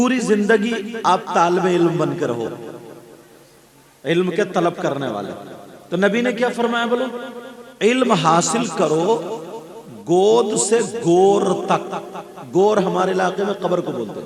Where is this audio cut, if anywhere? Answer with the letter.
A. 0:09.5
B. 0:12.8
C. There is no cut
C